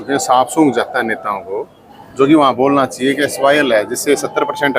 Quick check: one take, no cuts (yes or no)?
yes